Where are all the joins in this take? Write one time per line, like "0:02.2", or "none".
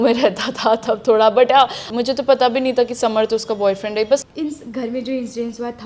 0:01.8
0:04.2